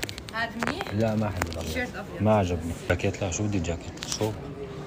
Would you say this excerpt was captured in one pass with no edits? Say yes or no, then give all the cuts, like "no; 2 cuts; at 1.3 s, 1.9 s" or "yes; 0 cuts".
no; 1 cut; at 2.9 s